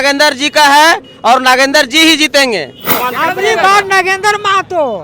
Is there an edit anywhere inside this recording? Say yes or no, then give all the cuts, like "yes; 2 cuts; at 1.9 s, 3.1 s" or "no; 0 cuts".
yes; 1 cut; at 3.0 s